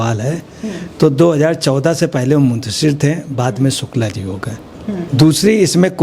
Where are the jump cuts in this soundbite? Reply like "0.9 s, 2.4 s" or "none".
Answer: 5.1 s